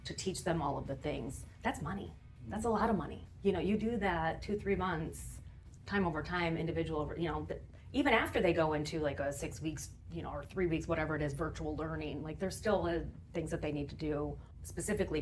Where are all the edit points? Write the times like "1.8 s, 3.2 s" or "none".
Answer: none